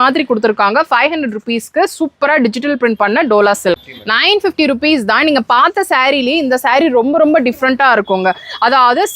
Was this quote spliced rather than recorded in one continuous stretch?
yes; 1 cut; at 3.9 s

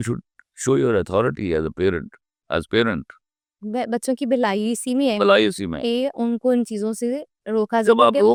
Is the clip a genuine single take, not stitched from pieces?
yes; 0 cuts

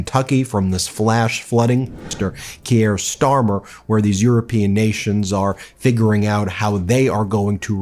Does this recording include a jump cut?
yes; 1 cut; at 2.0 s

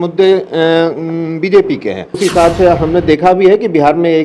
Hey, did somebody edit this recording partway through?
yes; 1 cut; at 2.2 s

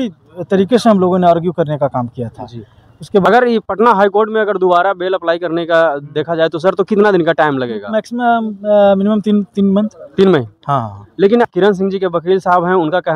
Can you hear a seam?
yes; 2 cuts; at 3.2 s, 11.5 s

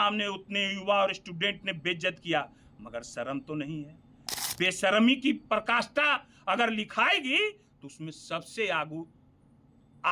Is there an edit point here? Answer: no; 0 cuts

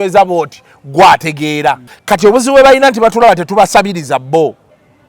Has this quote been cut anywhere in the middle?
yes; 1 cut; at 1.9 s

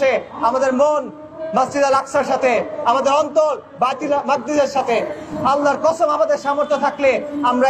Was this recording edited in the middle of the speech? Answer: no; 0 cuts

